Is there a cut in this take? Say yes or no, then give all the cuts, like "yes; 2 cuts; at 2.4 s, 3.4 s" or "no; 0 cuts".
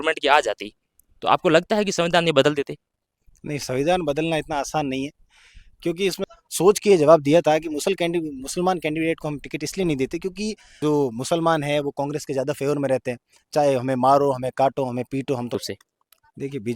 yes; 3 cuts; at 6.2 s, 10.6 s, 15.6 s